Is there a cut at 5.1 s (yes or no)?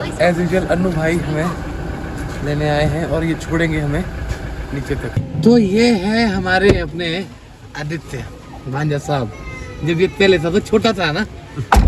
yes